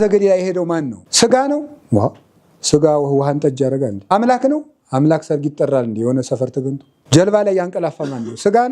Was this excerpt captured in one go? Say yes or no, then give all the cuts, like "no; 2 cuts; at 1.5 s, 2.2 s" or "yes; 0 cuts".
no; 3 cuts; at 1.0 s, 4.1 s, 6.9 s